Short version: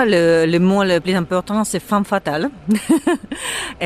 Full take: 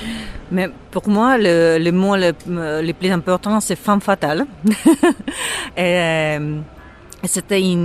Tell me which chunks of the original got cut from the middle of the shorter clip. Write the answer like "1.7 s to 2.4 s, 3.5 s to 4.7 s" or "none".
2.4 s to 3.0 s